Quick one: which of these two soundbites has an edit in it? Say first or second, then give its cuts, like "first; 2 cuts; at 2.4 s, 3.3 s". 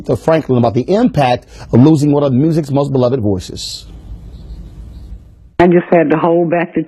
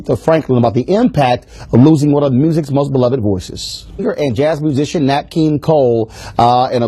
first; 1 cut; at 4.0 s